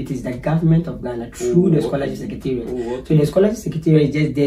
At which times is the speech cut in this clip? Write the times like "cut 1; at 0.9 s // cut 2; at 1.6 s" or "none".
none